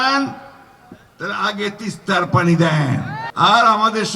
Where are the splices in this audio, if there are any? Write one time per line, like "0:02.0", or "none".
0:03.2